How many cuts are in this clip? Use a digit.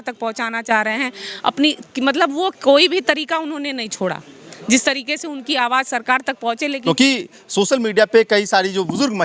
1